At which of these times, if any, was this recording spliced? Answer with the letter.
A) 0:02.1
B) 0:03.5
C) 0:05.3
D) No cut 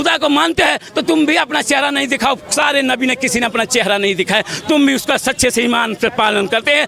D